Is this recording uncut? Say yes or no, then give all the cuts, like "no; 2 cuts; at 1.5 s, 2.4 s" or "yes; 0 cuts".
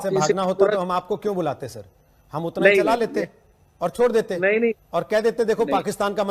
yes; 0 cuts